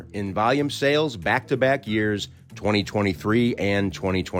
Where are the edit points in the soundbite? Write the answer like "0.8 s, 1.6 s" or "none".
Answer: none